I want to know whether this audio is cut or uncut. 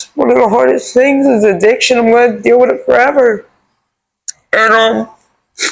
uncut